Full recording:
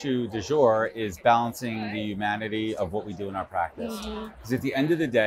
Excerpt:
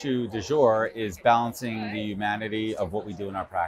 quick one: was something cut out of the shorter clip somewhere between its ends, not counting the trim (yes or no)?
no